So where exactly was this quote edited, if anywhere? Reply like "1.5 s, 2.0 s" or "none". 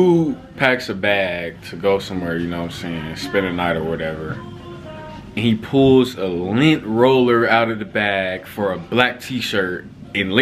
none